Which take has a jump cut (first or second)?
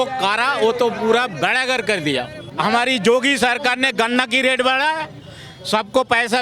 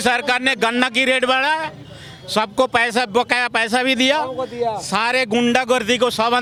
first